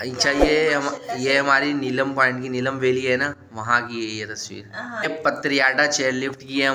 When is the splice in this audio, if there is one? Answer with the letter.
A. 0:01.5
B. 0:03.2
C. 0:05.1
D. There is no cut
C